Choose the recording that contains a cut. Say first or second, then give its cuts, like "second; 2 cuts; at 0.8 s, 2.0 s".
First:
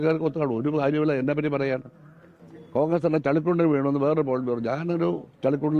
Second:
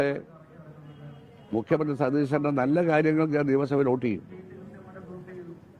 first; 1 cut; at 2.5 s